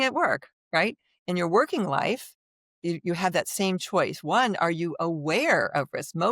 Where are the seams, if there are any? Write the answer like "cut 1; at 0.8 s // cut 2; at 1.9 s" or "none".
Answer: none